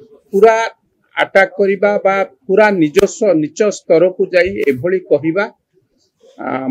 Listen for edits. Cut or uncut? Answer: uncut